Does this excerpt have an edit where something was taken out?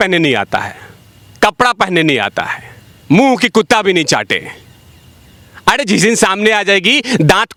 no; 0 cuts

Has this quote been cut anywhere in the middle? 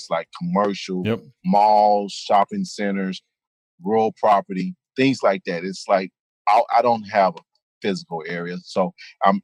no; 0 cuts

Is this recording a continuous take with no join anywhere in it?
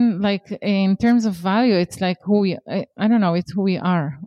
yes; 0 cuts

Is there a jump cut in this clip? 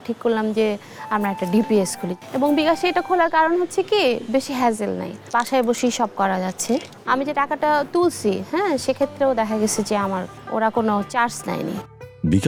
no; 0 cuts

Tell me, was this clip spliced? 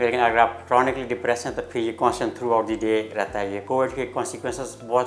yes; 1 cut; at 3.6 s

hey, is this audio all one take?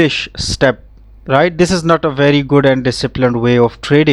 yes; 0 cuts

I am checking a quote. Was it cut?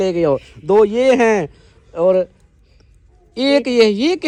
no; 0 cuts

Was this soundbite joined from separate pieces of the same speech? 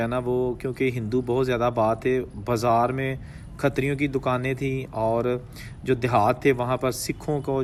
no; 0 cuts

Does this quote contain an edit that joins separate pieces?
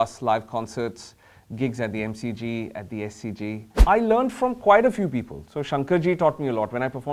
yes; 1 cut; at 3.7 s

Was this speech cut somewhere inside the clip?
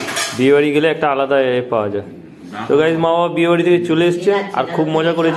no; 0 cuts

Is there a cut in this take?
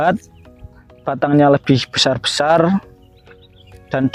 no; 0 cuts

